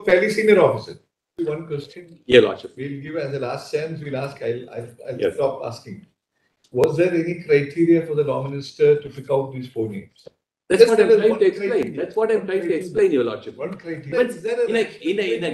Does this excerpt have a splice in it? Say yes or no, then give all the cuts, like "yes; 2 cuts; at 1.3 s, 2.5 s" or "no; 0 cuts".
yes; 2 cuts; at 1.3 s, 14.1 s